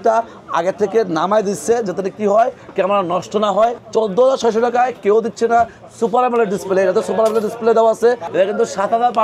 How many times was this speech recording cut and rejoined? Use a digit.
2